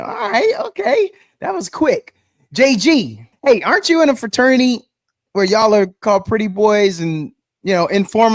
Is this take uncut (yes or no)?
no